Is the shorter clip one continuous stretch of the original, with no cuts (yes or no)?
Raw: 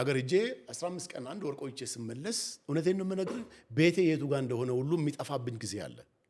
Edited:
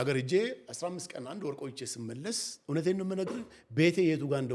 yes